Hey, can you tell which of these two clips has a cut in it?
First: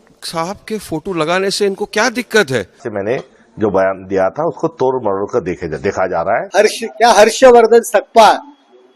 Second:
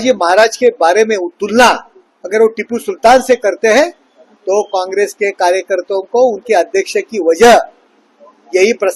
first; 2 cuts; at 2.8 s, 6.5 s

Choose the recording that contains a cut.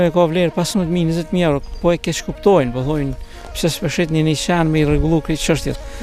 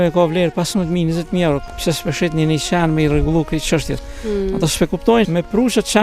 second; 2 cuts; at 1.7 s, 5.3 s

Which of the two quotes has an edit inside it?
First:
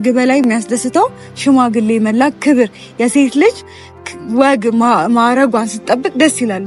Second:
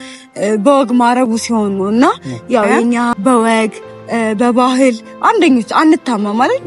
second; 1 cut; at 3.1 s

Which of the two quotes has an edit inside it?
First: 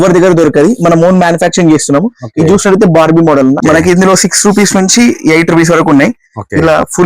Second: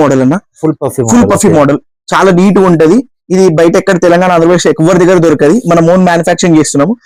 first; 1 cut; at 3.6 s

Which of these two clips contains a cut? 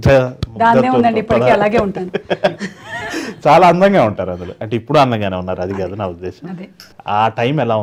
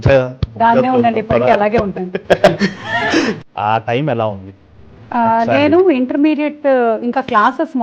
second; 1 cut; at 3.4 s

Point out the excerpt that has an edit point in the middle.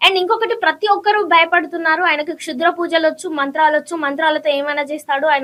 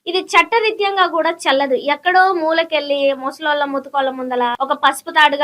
second; 1 cut; at 4.6 s

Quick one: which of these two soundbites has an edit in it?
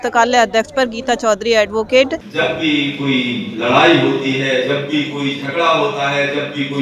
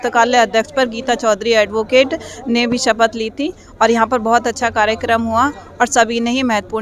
first; 1 cut; at 2.2 s

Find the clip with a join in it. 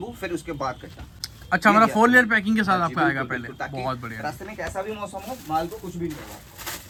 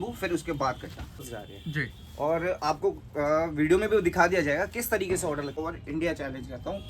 second; 2 cuts; at 1.3 s, 5.6 s

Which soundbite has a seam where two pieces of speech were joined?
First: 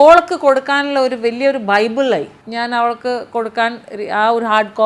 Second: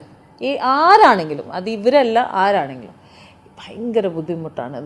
first; 1 cut; at 2.4 s

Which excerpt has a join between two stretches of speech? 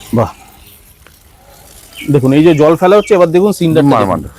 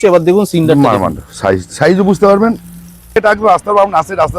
second; 1 cut; at 3.2 s

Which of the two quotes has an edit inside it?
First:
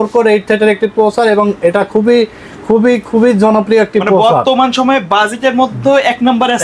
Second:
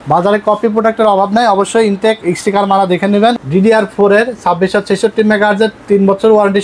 second; 1 cut; at 3.3 s

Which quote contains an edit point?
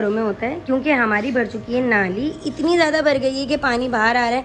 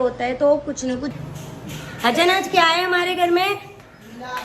second; 1 cut; at 1.1 s

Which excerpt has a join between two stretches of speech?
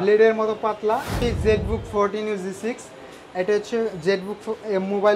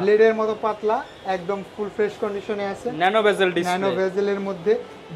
first; 1 cut; at 1.1 s

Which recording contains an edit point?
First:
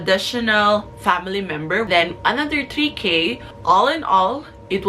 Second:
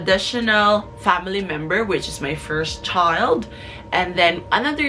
first; 2 cuts; at 1.9 s, 3.5 s

